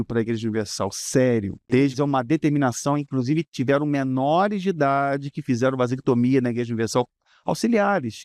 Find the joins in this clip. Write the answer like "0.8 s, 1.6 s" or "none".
1.6 s